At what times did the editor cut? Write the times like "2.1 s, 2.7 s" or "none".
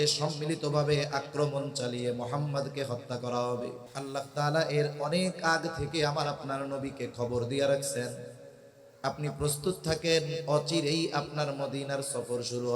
3.9 s